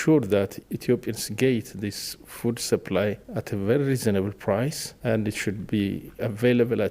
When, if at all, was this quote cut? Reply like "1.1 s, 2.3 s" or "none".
3.3 s, 4.9 s, 6.1 s